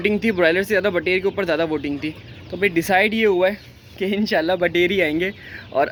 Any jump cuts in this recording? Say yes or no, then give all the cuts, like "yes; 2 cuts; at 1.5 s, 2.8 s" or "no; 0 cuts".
no; 0 cuts